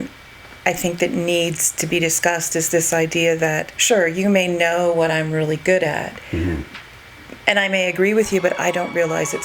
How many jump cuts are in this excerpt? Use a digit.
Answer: 1